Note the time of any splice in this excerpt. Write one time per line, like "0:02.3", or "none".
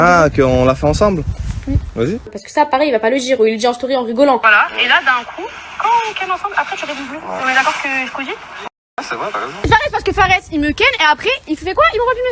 0:02.4
0:04.4
0:09.6